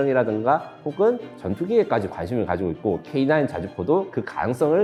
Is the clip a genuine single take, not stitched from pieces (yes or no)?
yes